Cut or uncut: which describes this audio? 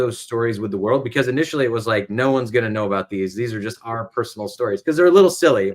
cut